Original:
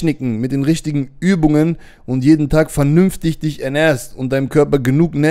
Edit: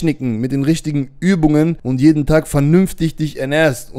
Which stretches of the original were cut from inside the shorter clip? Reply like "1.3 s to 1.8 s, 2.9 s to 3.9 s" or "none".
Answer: 1.8 s to 2.1 s